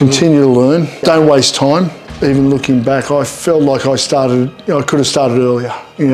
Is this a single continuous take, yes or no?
no